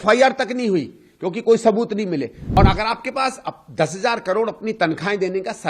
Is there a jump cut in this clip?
yes; 1 cut; at 2.6 s

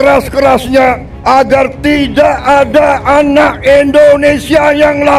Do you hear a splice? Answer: yes; 1 cut; at 1.1 s

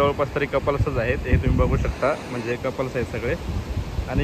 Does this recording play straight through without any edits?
yes; 0 cuts

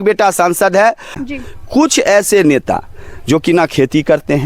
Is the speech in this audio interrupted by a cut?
yes; 1 cut; at 1.2 s

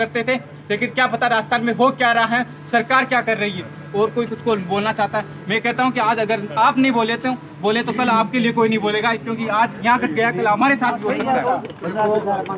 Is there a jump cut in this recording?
no; 0 cuts

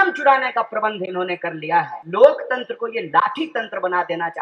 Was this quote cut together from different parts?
yes; 1 cut; at 2.0 s

